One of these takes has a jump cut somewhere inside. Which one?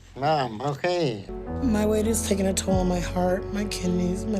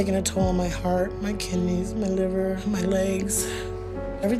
first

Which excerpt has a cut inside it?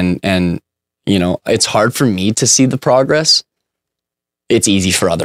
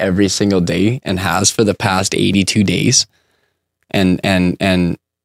second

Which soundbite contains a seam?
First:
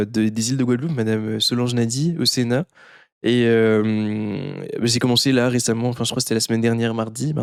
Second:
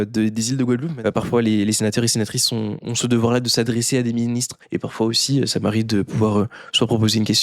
second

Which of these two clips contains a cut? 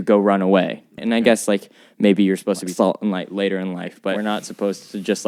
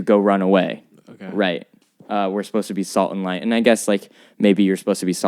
first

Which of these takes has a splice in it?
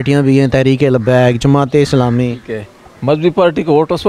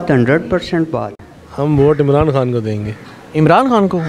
second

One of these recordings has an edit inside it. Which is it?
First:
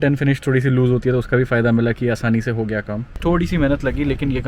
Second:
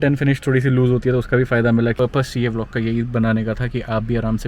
second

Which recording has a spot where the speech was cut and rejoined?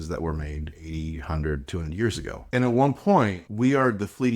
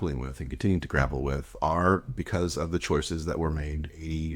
first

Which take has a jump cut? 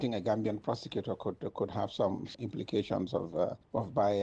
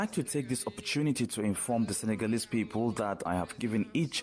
second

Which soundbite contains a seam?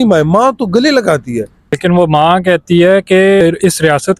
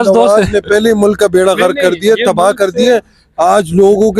first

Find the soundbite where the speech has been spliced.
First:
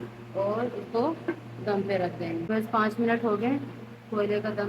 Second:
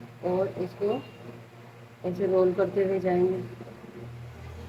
first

